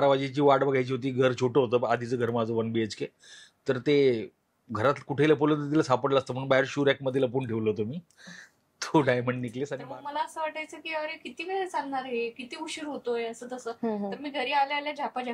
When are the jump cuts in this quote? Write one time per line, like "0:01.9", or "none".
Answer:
0:09.6